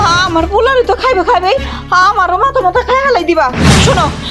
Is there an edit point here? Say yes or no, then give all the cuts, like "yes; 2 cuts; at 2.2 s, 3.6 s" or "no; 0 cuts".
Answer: no; 0 cuts